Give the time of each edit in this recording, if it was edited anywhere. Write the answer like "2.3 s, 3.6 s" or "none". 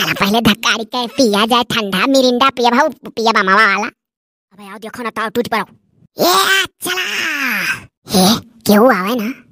4.7 s